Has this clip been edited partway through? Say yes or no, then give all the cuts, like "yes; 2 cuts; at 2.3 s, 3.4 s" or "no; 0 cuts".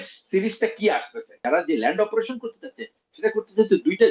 yes; 1 cut; at 1.3 s